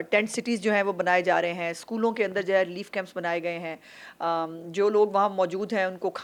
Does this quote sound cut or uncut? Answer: uncut